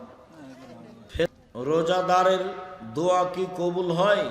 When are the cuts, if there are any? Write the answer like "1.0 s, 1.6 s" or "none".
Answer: 1.3 s